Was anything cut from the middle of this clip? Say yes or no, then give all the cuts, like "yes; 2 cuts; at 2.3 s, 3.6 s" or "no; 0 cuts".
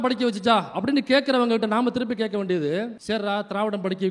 no; 0 cuts